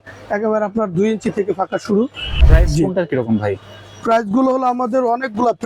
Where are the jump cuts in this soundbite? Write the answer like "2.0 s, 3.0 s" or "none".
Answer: 2.3 s